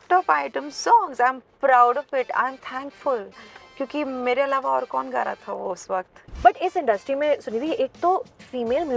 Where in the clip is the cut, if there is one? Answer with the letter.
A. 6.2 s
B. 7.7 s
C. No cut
A